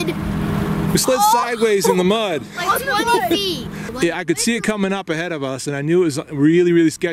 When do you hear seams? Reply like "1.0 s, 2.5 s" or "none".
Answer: 3.9 s